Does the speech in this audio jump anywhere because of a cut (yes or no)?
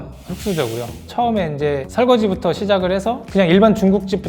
yes